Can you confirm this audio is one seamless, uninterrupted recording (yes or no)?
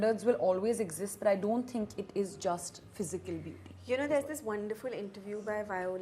yes